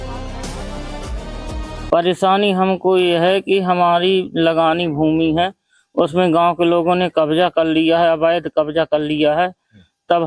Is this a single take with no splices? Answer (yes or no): no